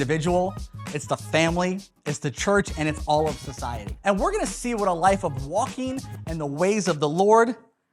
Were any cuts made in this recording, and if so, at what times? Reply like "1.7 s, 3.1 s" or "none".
3.9 s